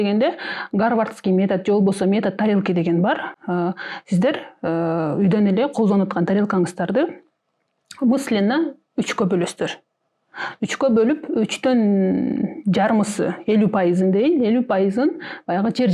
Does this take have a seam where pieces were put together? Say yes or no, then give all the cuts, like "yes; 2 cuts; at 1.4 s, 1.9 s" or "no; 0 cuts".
no; 0 cuts